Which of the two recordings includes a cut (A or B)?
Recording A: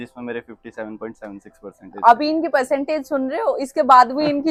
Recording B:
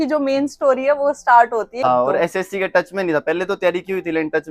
B